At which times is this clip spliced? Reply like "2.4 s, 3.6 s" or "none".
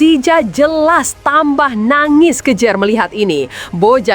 none